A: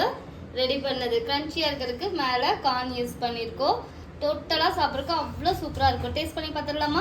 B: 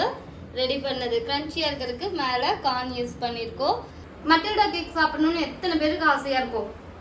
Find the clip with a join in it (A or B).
B